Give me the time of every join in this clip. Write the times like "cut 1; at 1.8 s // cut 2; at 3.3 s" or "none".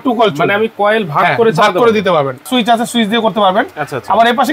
cut 1; at 2.4 s